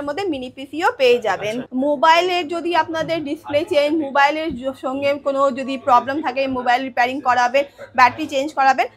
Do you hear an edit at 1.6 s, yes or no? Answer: yes